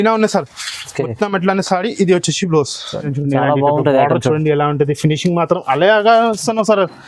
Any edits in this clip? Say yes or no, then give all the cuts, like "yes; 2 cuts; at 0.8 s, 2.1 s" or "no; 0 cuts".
yes; 1 cut; at 3.1 s